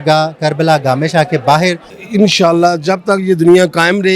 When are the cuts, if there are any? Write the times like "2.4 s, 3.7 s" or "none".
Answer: 1.9 s